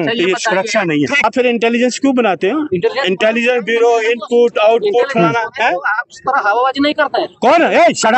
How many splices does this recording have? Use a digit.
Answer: 1